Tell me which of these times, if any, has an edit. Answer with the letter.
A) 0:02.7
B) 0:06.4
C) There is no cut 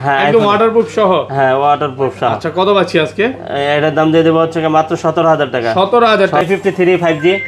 B